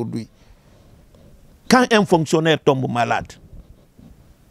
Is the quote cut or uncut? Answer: uncut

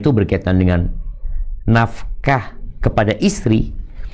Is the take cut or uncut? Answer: uncut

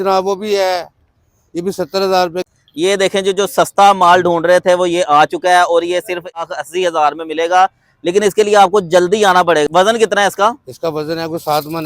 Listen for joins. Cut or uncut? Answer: cut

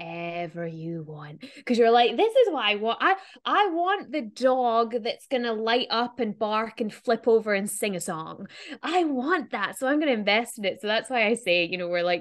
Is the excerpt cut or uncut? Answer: uncut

